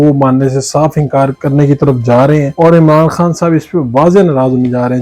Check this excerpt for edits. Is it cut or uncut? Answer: cut